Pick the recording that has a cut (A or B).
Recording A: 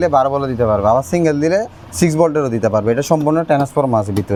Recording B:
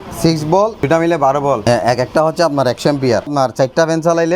B